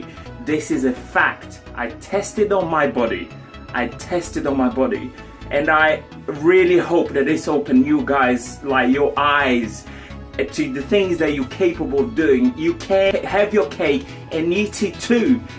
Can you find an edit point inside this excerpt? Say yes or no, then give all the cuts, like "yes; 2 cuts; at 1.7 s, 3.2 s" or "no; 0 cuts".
no; 0 cuts